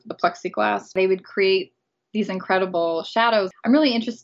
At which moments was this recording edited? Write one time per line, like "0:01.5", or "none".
0:00.9